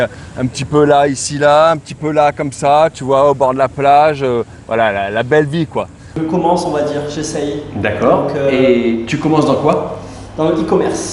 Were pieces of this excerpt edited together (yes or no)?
yes